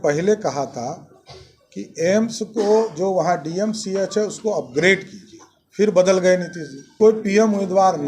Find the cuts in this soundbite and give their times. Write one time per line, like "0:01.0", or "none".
0:07.0

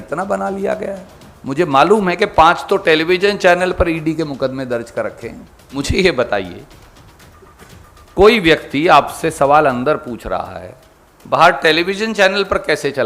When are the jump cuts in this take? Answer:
0:05.6

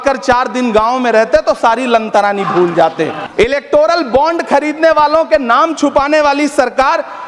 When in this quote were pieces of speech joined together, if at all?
0:03.2

